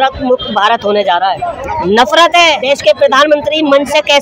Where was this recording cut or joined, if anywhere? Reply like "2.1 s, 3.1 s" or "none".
1.6 s, 2.6 s